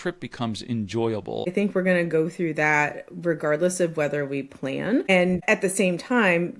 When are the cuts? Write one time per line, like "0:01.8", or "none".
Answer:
0:01.5
0:05.2